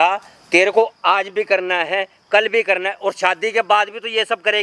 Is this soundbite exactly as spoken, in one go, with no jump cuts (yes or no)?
yes